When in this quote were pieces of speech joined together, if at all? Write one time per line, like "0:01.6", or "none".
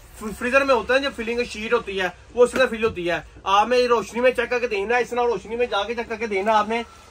none